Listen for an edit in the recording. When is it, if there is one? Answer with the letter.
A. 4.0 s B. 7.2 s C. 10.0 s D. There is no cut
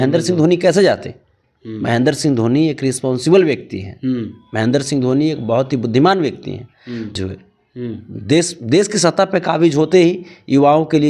B